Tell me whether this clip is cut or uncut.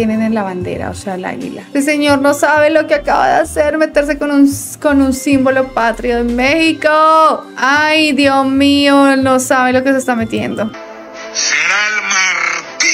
uncut